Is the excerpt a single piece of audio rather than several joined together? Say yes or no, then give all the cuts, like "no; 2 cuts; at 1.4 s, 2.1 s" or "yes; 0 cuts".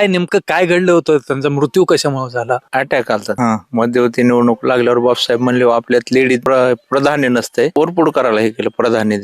no; 4 cuts; at 2.6 s, 3.3 s, 6.4 s, 7.7 s